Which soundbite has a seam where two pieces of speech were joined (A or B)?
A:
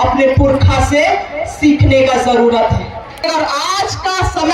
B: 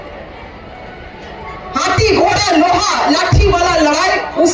A